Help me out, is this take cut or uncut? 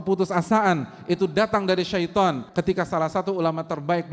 cut